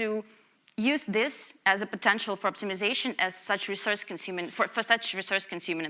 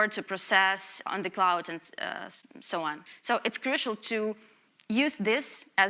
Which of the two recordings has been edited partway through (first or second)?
second